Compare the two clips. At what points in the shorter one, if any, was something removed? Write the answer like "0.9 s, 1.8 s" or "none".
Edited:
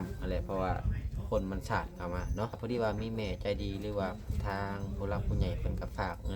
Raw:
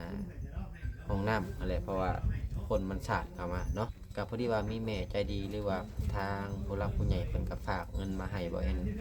2.6 s